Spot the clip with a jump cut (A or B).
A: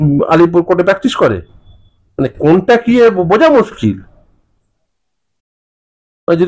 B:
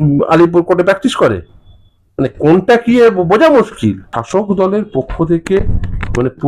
B